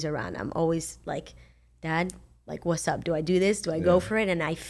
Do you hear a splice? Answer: no; 0 cuts

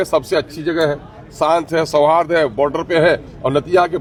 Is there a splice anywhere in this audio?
no; 0 cuts

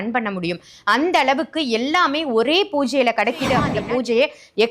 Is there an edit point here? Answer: yes; 1 cut; at 3.7 s

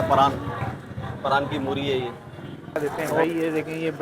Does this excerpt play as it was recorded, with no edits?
no; 1 cut; at 2.8 s

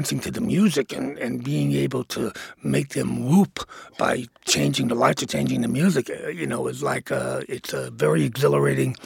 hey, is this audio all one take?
yes; 0 cuts

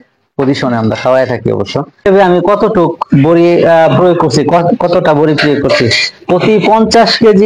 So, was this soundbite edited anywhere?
yes; 1 cut; at 2.1 s

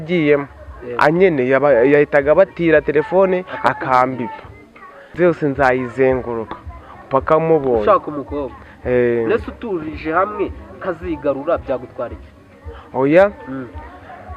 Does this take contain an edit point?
yes; 1 cut; at 5.1 s

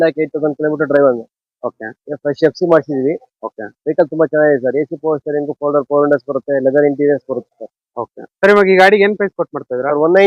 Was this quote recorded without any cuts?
yes; 0 cuts

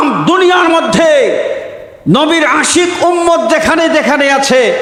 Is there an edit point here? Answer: no; 0 cuts

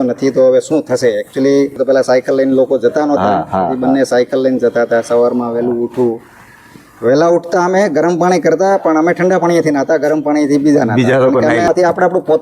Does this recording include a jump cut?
yes; 2 cuts; at 1.8 s, 11.7 s

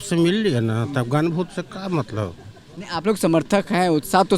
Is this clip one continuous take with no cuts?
yes; 0 cuts

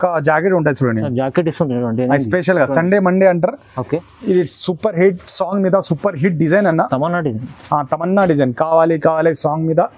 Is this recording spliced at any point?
yes; 1 cut; at 3.8 s

